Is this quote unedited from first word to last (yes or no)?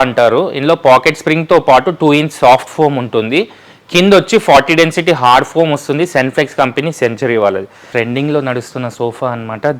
no